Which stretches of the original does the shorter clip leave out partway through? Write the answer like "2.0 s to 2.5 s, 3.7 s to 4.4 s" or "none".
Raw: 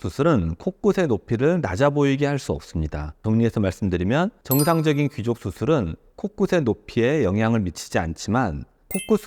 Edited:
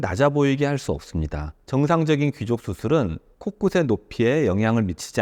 3.2 s to 4.4 s